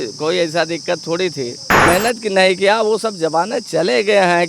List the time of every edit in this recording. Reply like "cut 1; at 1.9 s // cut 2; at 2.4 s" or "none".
cut 1; at 1.9 s